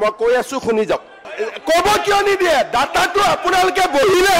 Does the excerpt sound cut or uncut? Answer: cut